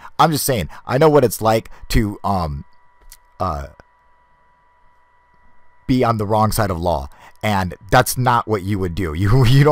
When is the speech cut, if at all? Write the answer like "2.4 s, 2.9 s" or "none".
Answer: 2.2 s